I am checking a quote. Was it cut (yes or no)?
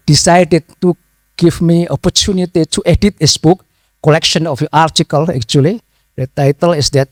no